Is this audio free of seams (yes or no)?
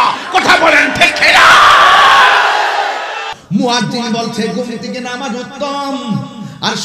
no